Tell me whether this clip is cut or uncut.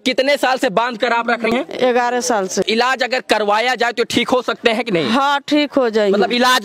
cut